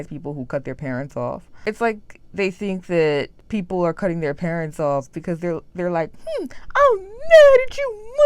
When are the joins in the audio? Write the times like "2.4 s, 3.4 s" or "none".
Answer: 1.5 s, 3.4 s